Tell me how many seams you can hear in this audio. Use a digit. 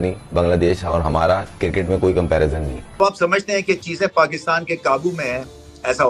1